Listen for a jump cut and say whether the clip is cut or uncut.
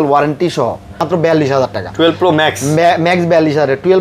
cut